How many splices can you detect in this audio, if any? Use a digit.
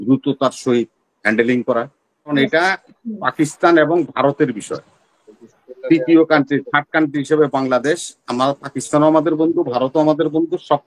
1